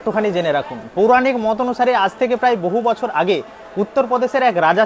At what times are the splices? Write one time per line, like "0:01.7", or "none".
none